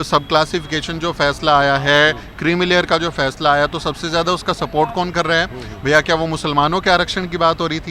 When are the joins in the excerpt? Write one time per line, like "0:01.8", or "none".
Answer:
none